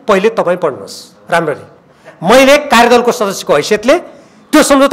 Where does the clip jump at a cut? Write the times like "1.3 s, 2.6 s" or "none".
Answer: none